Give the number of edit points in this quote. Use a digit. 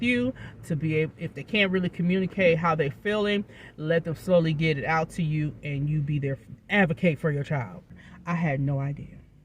1